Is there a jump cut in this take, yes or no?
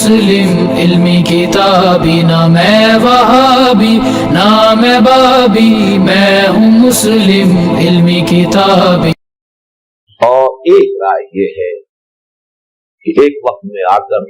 yes